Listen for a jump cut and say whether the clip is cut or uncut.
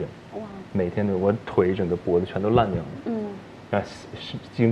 uncut